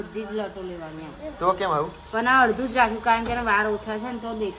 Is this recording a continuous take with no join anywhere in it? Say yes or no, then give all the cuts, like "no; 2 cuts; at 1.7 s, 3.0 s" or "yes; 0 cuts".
yes; 0 cuts